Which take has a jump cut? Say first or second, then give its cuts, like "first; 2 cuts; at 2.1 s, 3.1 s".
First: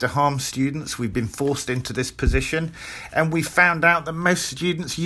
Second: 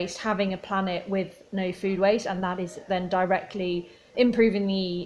second; 1 cut; at 4.1 s